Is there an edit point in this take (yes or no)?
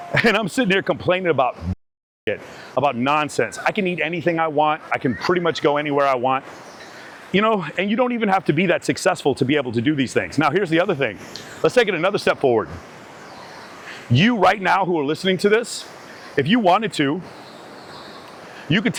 no